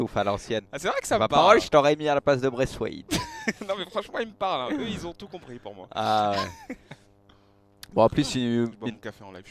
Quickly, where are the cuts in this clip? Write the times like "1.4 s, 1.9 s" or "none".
3.1 s